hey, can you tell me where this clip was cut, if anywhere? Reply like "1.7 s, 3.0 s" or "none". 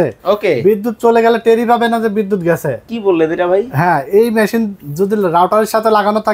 none